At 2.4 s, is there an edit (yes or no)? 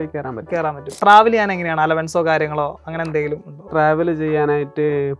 no